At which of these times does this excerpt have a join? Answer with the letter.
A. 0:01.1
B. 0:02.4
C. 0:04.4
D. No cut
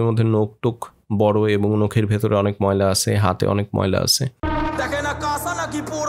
C